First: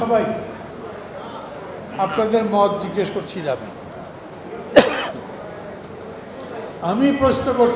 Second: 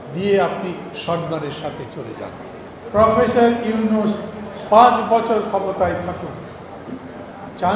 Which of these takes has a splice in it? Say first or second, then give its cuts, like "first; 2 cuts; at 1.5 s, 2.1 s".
second; 1 cut; at 2.7 s